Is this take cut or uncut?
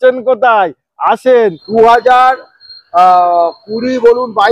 cut